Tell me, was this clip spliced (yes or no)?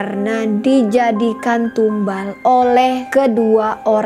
yes